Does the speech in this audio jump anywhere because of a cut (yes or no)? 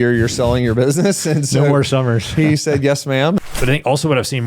yes